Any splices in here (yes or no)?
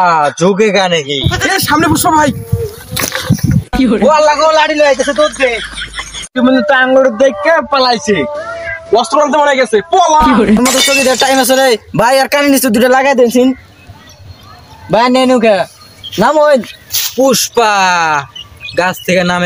yes